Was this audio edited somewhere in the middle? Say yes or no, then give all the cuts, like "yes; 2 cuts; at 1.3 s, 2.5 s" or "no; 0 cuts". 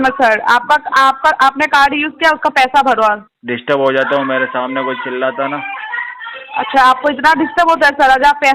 no; 0 cuts